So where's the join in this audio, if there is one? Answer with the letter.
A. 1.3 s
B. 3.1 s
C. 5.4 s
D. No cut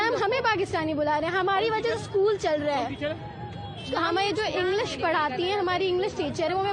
D